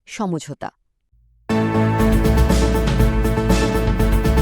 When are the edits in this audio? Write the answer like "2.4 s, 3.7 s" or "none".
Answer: 1.3 s